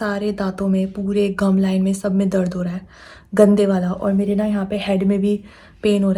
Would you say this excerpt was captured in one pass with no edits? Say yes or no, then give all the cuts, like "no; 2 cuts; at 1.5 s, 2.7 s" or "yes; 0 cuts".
yes; 0 cuts